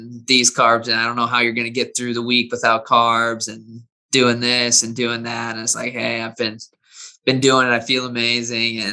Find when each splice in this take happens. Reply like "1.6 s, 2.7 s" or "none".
none